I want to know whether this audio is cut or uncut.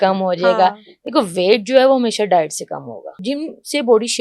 cut